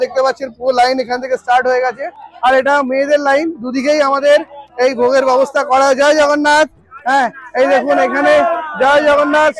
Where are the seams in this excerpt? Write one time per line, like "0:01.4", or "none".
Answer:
0:02.3